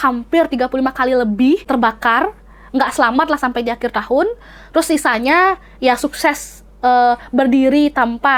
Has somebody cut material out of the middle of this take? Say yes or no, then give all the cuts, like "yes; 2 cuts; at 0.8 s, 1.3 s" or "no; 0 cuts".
yes; 1 cut; at 1.6 s